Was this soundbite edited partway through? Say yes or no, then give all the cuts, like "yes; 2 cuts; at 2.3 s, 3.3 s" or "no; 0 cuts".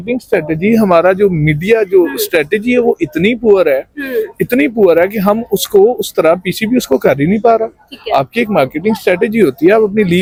no; 0 cuts